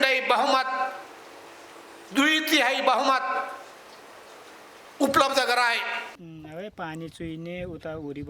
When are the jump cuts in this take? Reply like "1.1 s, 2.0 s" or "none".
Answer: 6.2 s